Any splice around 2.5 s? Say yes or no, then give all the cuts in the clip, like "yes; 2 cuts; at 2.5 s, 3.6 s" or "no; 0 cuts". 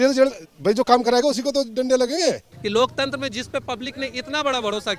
yes; 1 cut; at 2.5 s